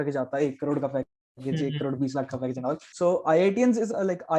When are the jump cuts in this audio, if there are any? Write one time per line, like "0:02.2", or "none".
0:02.9